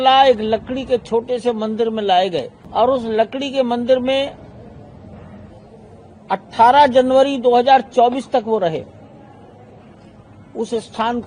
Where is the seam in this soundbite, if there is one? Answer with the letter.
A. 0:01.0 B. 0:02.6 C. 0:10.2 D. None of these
B